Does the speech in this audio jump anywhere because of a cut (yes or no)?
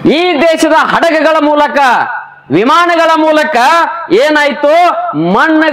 no